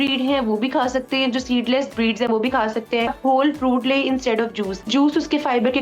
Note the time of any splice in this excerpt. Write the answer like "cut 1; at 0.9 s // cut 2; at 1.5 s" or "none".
cut 1; at 3.2 s // cut 2; at 4.9 s

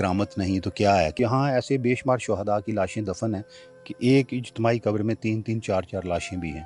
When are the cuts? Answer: cut 1; at 1.2 s

